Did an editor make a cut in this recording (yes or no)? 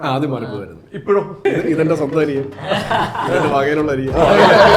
yes